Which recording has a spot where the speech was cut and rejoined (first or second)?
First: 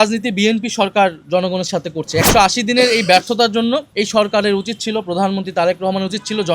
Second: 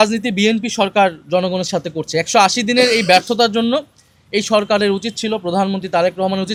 first